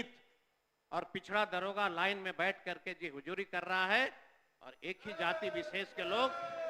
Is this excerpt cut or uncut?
uncut